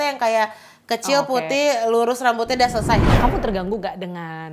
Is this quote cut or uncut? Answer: cut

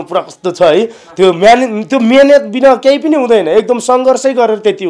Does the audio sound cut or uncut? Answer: uncut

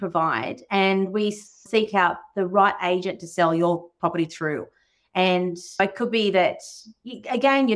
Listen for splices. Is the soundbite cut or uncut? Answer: uncut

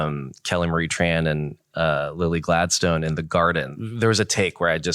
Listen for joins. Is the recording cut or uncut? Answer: cut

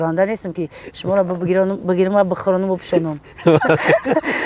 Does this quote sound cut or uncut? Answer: uncut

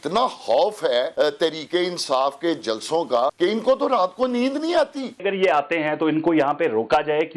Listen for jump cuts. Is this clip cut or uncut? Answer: cut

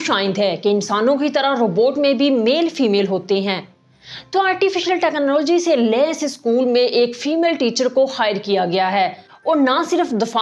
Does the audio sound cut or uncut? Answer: cut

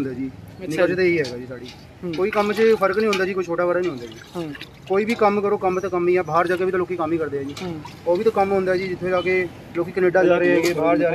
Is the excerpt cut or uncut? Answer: uncut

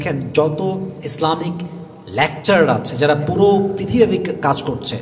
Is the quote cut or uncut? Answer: uncut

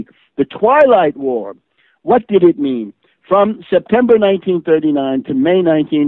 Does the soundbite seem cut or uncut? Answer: uncut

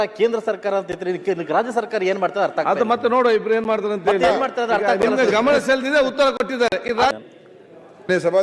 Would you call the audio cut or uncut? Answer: cut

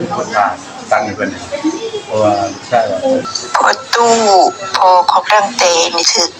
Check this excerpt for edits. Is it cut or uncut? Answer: cut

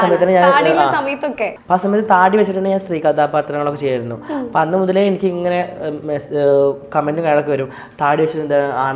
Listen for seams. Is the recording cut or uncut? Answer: cut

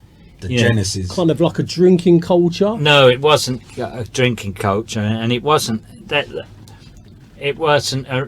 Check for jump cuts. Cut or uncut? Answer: cut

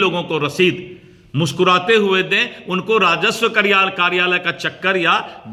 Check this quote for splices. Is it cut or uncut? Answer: uncut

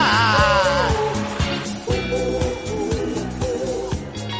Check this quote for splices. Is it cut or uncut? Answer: uncut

